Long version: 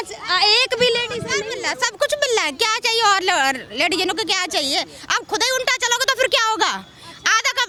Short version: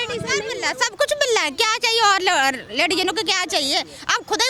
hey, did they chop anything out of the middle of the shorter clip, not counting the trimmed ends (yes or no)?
no